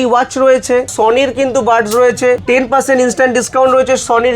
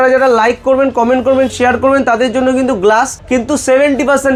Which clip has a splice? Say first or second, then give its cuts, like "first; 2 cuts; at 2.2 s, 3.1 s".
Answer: first; 2 cuts; at 0.9 s, 2.4 s